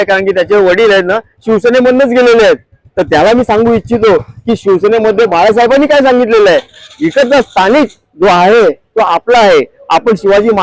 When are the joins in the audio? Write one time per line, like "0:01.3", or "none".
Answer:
none